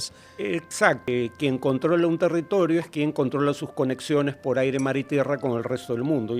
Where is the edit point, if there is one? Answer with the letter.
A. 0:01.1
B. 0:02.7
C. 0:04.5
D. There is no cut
A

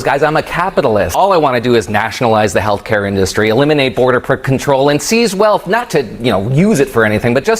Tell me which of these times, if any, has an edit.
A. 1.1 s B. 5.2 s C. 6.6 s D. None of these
A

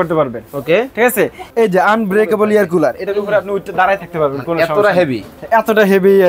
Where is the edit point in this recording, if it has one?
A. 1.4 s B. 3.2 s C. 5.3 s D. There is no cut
A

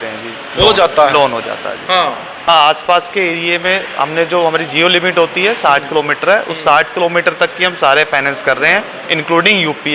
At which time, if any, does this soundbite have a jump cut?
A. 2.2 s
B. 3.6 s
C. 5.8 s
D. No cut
A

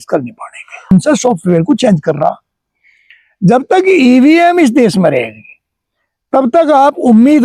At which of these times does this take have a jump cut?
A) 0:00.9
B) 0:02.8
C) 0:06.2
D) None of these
A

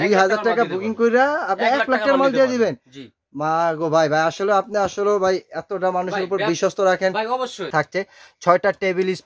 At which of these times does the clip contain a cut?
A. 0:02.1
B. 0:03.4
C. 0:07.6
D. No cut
C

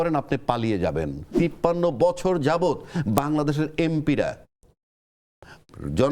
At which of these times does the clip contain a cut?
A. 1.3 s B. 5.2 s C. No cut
A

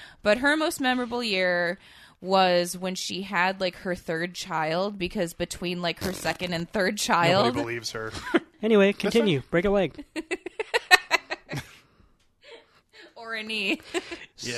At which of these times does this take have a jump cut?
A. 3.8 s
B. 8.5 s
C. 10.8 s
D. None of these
B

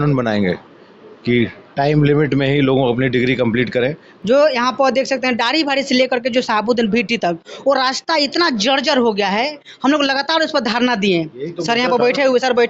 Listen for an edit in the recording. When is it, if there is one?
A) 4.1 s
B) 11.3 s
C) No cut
A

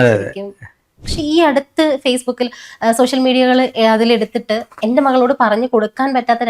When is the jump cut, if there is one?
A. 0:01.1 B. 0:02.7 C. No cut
A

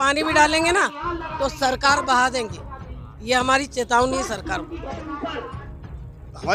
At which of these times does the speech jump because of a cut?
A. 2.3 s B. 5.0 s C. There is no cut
B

